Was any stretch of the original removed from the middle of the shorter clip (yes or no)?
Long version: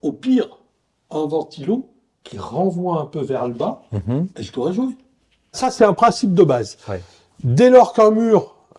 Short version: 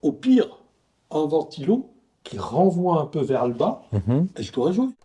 no